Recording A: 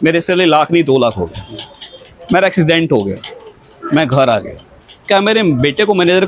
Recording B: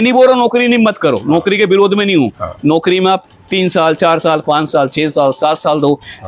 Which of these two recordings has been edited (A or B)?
B